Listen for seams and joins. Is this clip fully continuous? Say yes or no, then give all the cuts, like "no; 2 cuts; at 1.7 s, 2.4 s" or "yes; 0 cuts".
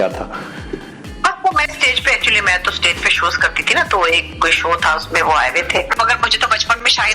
no; 1 cut; at 5.9 s